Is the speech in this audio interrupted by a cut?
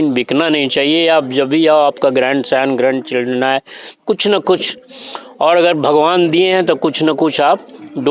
no; 0 cuts

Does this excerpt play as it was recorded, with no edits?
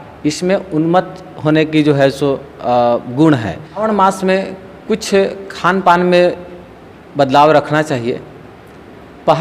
no; 1 cut; at 3.8 s

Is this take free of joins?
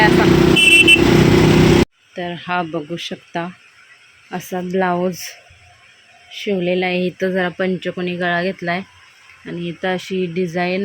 no; 1 cut; at 1.8 s

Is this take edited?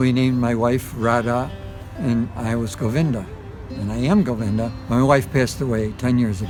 no; 0 cuts

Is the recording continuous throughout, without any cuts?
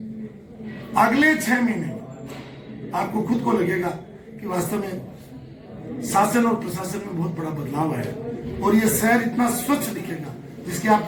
yes; 0 cuts

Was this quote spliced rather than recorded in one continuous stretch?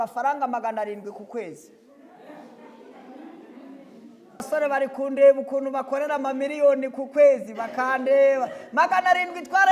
yes; 1 cut; at 4.4 s

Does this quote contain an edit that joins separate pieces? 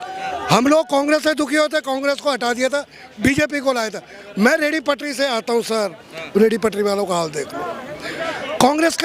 no; 0 cuts

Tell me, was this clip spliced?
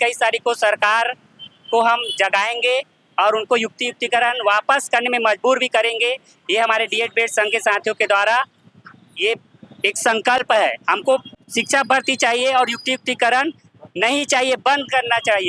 no; 0 cuts

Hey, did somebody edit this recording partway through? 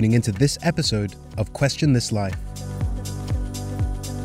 yes; 1 cut; at 2.4 s

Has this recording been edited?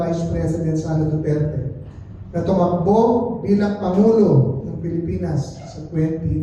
no; 0 cuts

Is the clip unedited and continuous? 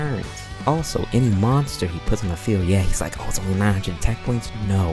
yes; 0 cuts

